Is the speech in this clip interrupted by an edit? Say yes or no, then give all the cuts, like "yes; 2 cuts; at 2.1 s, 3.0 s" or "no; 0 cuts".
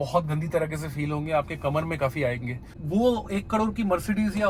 yes; 1 cut; at 2.7 s